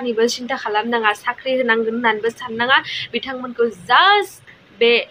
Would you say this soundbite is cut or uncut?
uncut